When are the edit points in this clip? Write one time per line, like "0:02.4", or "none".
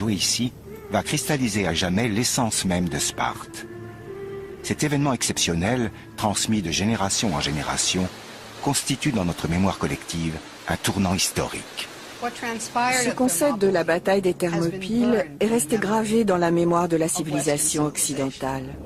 0:06.6